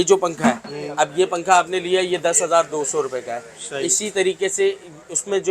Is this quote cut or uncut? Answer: uncut